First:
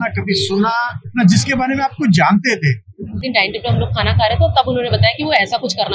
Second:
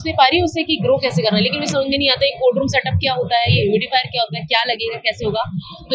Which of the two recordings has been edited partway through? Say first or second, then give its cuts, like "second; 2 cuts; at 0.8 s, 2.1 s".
first; 2 cuts; at 1.0 s, 3.2 s